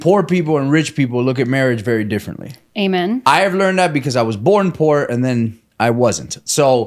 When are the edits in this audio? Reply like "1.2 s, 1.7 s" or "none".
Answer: none